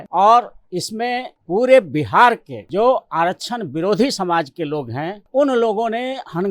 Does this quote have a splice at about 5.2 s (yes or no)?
yes